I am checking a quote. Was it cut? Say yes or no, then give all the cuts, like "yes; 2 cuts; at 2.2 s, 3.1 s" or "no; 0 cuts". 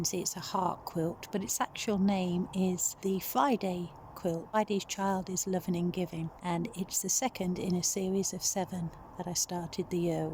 yes; 3 cuts; at 2.9 s, 4.6 s, 6.3 s